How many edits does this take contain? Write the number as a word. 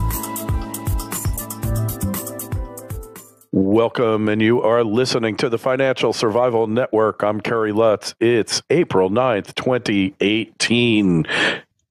one